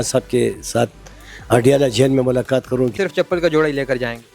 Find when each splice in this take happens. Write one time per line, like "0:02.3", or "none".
0:03.0